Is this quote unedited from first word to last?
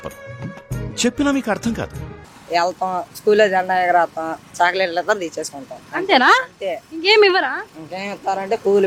yes; 0 cuts

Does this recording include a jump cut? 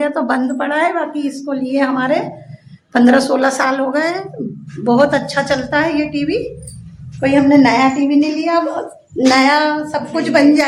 no; 0 cuts

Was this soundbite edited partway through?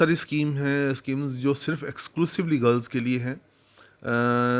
no; 0 cuts

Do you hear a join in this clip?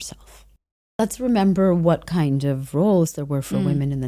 yes; 1 cut; at 0.9 s

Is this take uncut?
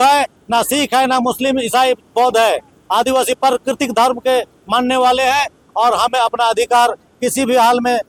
yes; 0 cuts

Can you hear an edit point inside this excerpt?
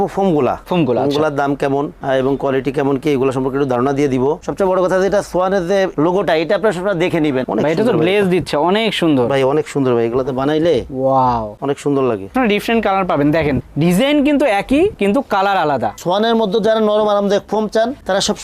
yes; 4 cuts; at 4.4 s, 7.4 s, 12.3 s, 15.9 s

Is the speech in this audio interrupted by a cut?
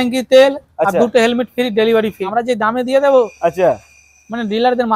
yes; 1 cut; at 2.2 s

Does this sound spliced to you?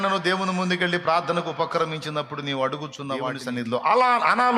yes; 1 cut; at 3.4 s

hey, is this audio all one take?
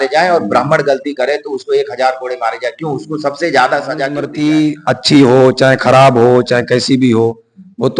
no; 1 cut; at 4.2 s

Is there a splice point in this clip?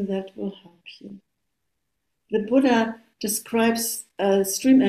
no; 0 cuts

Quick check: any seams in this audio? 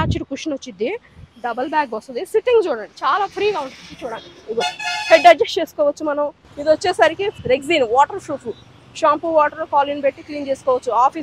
yes; 1 cut; at 6.5 s

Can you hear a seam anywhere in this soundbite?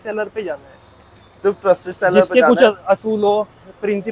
no; 0 cuts

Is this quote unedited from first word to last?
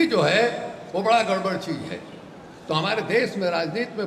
yes; 0 cuts

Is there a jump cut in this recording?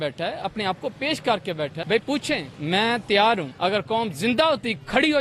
yes; 3 cuts; at 1.8 s, 2.5 s, 3.5 s

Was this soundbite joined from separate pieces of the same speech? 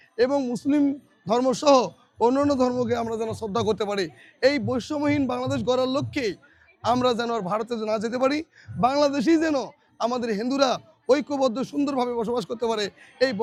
no; 0 cuts

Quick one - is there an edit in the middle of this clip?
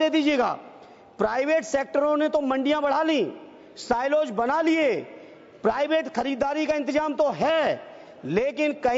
no; 0 cuts

